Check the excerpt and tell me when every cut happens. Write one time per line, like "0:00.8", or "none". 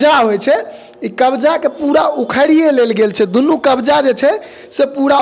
none